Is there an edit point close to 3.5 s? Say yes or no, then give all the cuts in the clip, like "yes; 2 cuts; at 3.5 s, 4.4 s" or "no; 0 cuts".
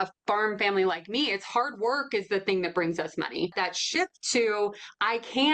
yes; 1 cut; at 3.5 s